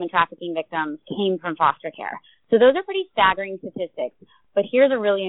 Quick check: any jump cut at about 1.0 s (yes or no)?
yes